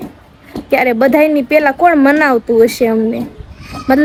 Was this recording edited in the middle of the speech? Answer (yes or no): no